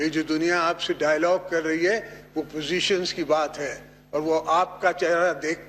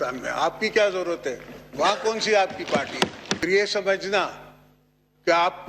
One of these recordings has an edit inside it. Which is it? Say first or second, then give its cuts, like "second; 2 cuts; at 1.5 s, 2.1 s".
second; 1 cut; at 3.4 s